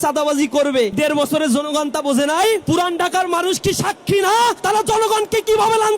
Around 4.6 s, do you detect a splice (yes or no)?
yes